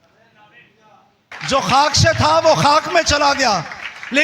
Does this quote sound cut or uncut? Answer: cut